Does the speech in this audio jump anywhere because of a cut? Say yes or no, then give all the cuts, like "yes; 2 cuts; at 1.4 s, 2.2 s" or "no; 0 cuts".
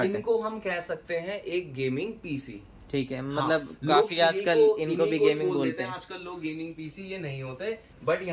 no; 0 cuts